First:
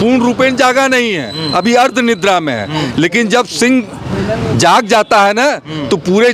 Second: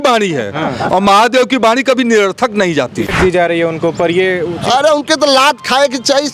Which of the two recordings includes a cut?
second; 1 cut; at 3.1 s

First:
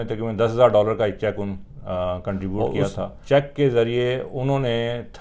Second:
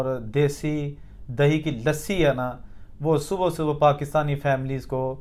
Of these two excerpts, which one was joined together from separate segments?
first; 1 cut; at 2.6 s

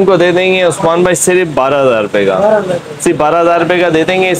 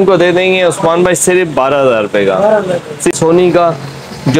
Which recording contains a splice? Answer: second; 1 cut; at 3.2 s

